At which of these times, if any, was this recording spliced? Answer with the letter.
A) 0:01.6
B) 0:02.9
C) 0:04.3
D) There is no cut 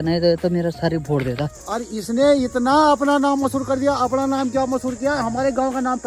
A